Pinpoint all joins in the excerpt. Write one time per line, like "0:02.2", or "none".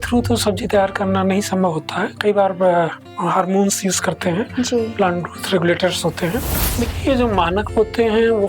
0:06.6